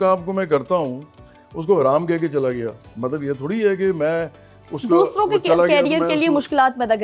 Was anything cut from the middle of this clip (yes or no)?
no